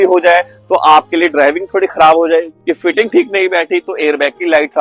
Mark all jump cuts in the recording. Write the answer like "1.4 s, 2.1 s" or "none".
2.5 s